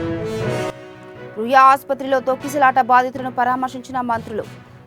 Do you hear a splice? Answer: yes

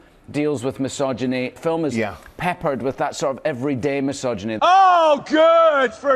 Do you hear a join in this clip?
yes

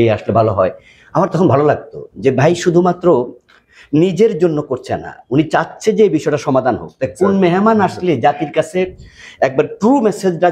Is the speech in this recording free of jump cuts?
yes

